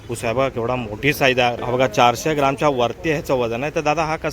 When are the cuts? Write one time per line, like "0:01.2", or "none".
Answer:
0:01.6